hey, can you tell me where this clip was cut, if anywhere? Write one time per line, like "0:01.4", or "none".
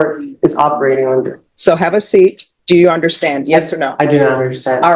0:01.4
0:02.5